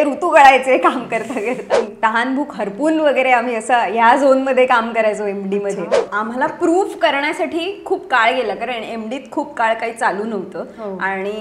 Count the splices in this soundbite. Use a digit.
2